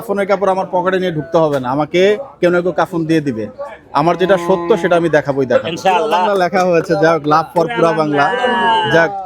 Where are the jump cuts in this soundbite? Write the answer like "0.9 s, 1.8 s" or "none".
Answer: 6.3 s